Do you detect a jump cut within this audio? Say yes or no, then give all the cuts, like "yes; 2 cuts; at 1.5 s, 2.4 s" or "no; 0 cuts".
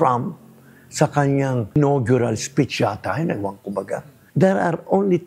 yes; 2 cuts; at 1.8 s, 4.2 s